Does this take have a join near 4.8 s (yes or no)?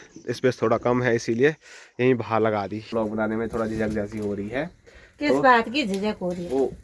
no